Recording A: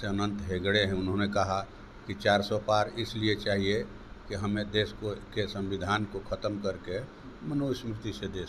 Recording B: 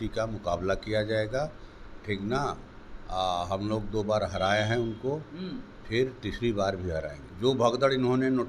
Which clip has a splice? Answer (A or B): B